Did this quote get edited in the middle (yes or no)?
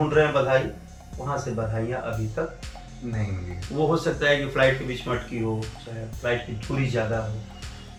no